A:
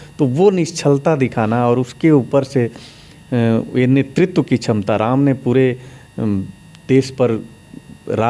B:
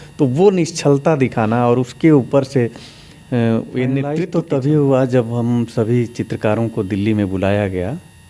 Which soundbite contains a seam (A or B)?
B